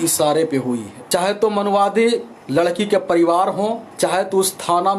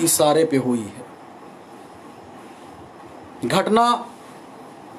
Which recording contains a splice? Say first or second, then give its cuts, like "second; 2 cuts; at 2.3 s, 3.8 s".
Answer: first; 3 cuts; at 0.9 s, 2.3 s, 3.9 s